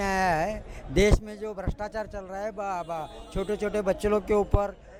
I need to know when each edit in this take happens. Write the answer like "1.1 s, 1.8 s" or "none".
none